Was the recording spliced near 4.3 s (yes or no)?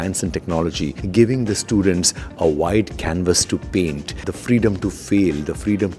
yes